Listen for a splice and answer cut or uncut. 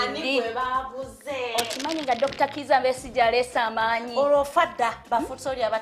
uncut